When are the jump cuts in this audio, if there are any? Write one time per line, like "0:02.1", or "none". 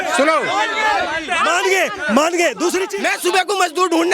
0:02.9